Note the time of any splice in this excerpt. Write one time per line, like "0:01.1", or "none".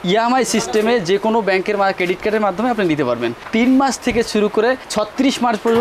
0:03.4